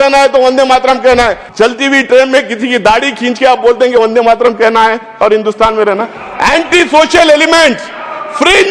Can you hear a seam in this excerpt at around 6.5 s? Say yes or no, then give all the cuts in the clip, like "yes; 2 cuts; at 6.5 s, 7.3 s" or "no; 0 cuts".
no; 1 cut; at 1.4 s